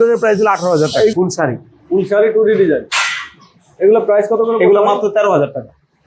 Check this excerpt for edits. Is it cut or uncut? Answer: cut